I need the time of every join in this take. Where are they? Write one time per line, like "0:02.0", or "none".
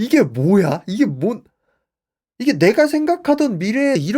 0:02.4

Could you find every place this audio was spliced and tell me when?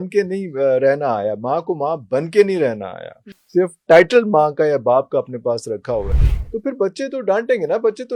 none

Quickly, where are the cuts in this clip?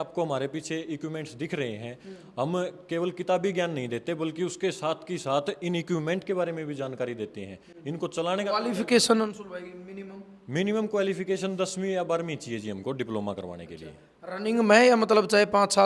none

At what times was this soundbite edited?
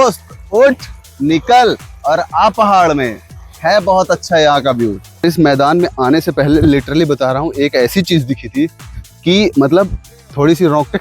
0:05.2

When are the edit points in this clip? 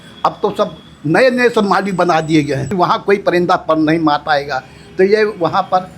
0:02.7

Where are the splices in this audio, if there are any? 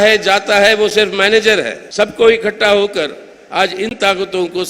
0:01.8

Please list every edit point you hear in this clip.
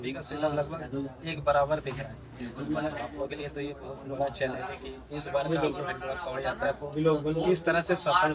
none

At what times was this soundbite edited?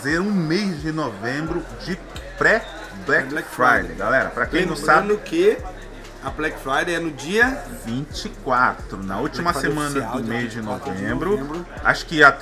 none

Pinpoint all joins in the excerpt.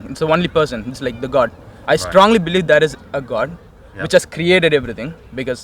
none

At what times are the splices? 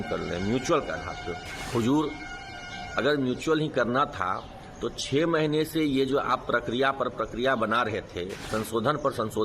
0:01.5
0:08.4

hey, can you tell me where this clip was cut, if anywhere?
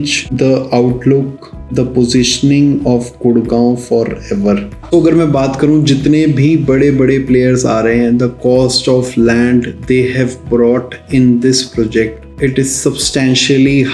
0:04.7

